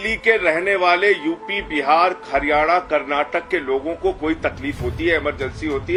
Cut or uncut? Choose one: uncut